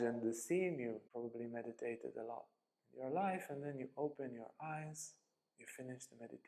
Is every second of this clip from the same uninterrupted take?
no; 1 cut; at 1.1 s

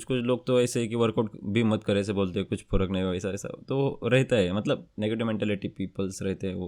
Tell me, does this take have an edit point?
no; 0 cuts

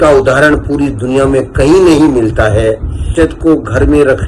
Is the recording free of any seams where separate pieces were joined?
no; 1 cut; at 3.1 s

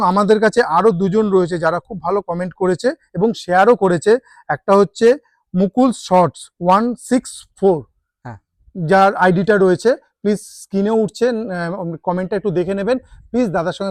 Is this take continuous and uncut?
yes; 0 cuts

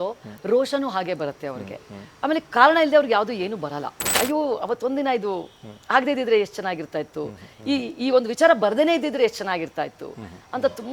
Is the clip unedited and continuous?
no; 1 cut; at 4.1 s

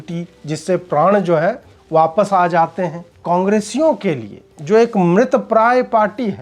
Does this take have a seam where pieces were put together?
yes; 1 cut; at 3.1 s

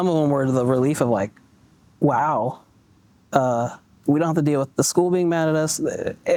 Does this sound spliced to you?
no; 0 cuts

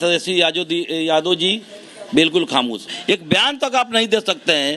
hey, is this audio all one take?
no; 1 cut; at 2.8 s

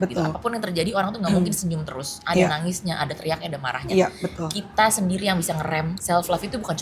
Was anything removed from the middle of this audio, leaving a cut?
yes; 1 cut; at 5.9 s

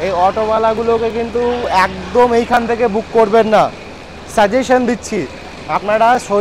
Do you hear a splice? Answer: no; 0 cuts

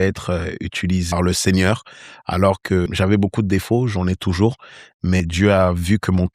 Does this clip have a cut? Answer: yes; 3 cuts; at 1.1 s, 2.9 s, 5.2 s

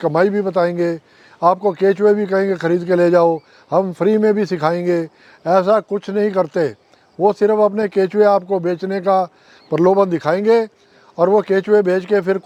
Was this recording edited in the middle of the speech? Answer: no; 0 cuts

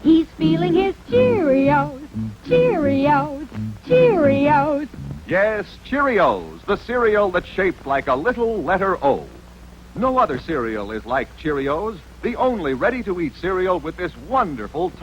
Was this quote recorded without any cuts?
no; 1 cut; at 10.8 s

